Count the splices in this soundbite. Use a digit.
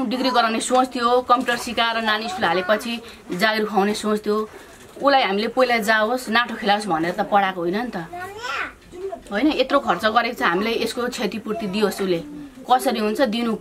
0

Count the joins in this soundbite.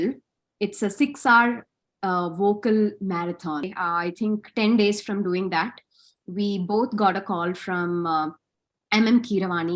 1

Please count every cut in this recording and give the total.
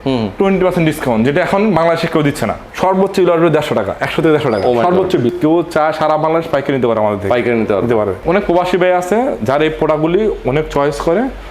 3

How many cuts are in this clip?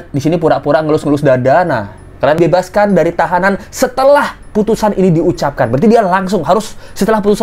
1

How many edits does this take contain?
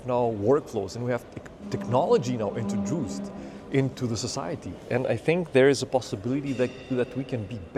0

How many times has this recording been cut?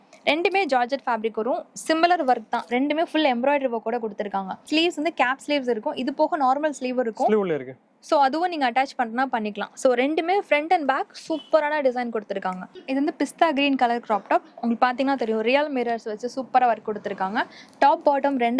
2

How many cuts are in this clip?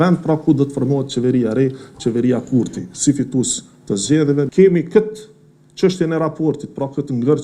1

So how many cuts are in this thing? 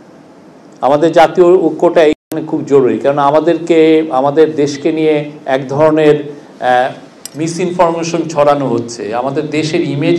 0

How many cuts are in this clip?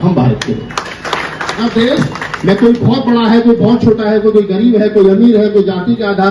1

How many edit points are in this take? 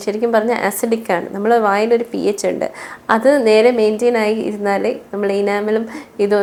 0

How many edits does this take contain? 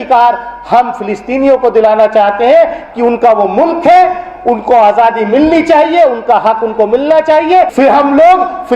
1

